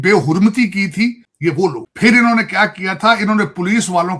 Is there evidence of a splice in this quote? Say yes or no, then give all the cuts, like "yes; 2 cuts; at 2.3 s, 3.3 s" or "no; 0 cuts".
yes; 1 cut; at 1.3 s